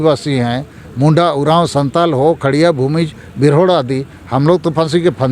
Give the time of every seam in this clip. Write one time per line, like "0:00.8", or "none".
none